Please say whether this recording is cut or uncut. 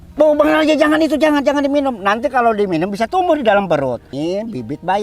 cut